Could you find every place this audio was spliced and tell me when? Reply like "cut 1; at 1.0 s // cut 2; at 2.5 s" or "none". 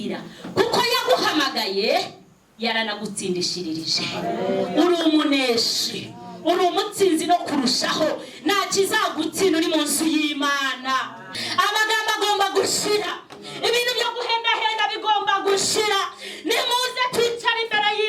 cut 1; at 11.2 s